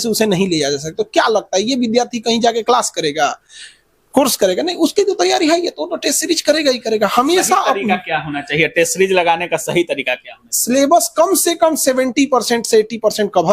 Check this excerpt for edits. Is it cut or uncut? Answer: uncut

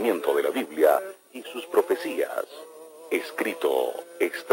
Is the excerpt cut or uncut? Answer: uncut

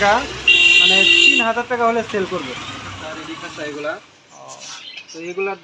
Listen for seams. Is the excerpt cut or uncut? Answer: cut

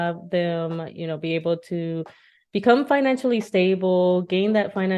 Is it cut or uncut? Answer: uncut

